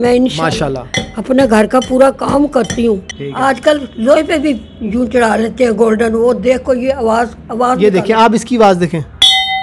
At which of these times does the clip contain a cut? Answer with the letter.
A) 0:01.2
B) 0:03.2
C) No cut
B